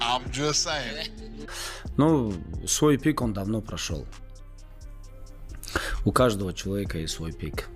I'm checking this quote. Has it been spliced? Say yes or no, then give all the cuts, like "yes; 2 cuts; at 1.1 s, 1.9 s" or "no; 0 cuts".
yes; 1 cut; at 1.5 s